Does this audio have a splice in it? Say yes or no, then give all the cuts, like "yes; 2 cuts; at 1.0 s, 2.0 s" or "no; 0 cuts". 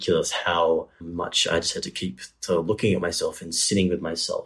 yes; 1 cut; at 1.1 s